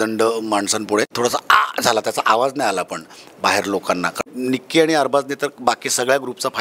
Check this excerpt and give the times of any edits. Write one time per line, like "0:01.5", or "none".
0:01.1
0:04.3